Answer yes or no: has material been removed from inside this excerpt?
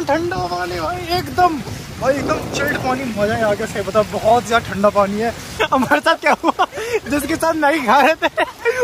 yes